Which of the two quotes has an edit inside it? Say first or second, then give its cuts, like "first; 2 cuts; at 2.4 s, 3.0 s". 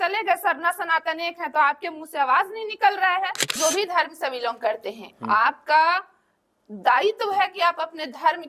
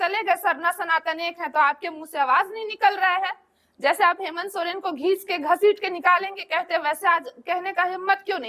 first; 1 cut; at 3.5 s